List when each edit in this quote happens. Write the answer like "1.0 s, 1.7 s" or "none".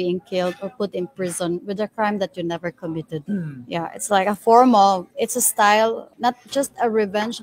3.2 s, 5.1 s, 6.1 s